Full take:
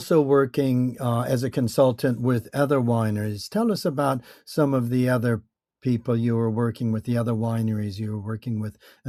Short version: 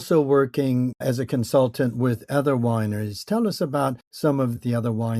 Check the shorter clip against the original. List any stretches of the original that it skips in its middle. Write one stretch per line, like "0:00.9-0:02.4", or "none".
0:01.0-0:01.2
0:04.5-0:06.7